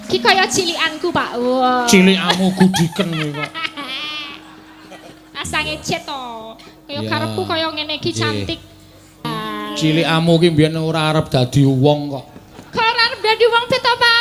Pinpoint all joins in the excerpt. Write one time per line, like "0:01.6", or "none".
0:09.3